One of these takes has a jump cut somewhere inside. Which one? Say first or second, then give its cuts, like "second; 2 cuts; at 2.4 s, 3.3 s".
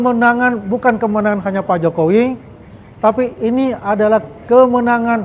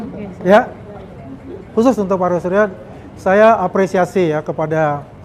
second; 1 cut; at 1.7 s